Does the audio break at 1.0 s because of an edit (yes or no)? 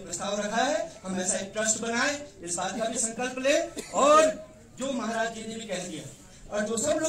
no